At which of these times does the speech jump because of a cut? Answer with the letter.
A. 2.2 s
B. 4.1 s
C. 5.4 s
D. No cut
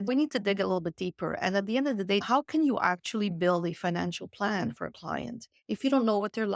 A